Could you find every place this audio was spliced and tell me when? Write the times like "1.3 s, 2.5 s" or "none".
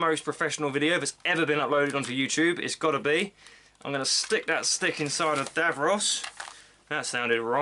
none